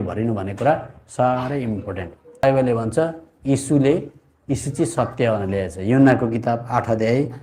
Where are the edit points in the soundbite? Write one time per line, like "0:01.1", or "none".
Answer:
0:02.4